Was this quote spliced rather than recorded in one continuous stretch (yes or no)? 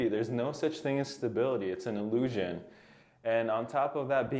no